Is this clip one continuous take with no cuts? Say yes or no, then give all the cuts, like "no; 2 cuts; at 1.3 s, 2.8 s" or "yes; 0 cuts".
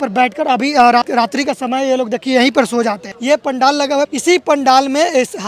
no; 3 cuts; at 1.0 s, 3.1 s, 4.1 s